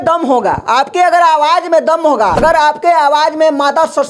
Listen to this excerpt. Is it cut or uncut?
cut